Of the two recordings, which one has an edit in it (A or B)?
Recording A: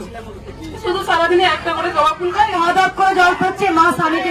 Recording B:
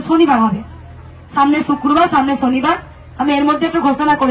A